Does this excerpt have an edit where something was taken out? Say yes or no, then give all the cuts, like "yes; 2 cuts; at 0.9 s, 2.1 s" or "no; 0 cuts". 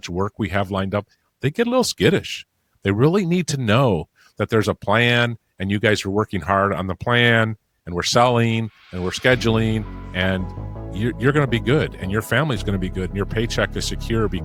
no; 0 cuts